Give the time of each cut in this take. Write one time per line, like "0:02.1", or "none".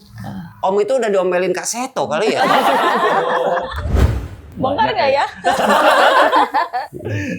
0:03.9